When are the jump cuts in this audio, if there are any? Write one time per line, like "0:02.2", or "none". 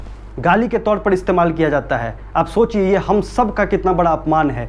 none

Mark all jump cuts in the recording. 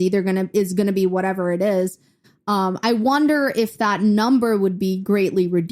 none

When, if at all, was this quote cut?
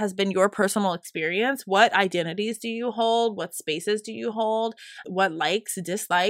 0:05.0

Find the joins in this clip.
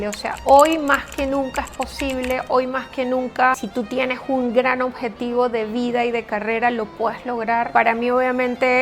0:03.6
0:07.7

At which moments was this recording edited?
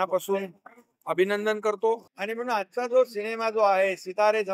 0:02.2

